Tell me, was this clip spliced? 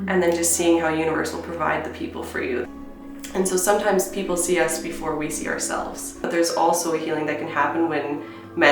yes; 2 cuts; at 2.7 s, 6.3 s

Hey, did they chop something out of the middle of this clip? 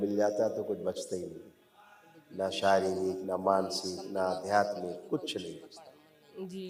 no; 0 cuts

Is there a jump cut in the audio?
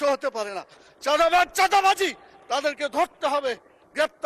no; 0 cuts

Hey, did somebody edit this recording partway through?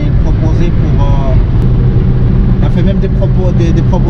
yes; 1 cut; at 1.6 s

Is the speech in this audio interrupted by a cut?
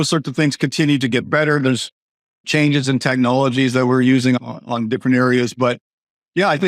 yes; 1 cut; at 4.4 s

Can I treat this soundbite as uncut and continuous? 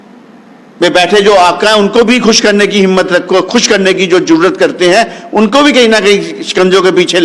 yes; 0 cuts

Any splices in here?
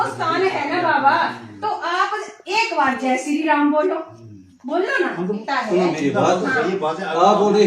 yes; 1 cut; at 5.4 s

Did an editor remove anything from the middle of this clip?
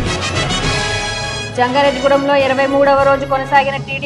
yes; 1 cut; at 1.4 s

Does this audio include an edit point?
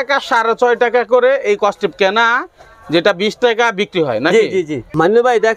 no; 0 cuts

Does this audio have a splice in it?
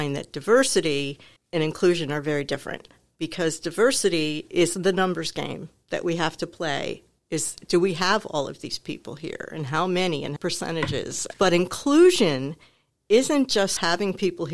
no; 0 cuts

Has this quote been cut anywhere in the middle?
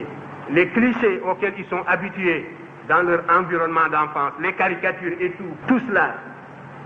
yes; 1 cut; at 5.5 s

